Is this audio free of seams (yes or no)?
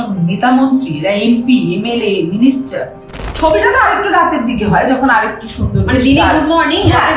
no